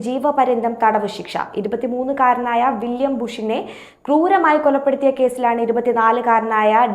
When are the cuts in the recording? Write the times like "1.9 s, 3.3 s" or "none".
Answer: none